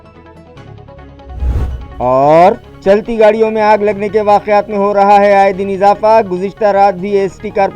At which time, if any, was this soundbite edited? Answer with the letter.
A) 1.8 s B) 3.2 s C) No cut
A